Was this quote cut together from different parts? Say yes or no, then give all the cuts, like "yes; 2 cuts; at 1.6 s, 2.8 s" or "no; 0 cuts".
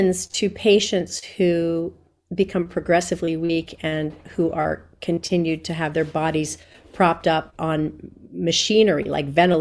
no; 0 cuts